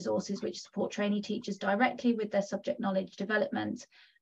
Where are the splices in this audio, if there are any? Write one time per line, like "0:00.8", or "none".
none